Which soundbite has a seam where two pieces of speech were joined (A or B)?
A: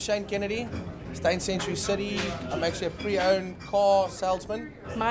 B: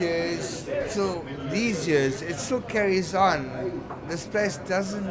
A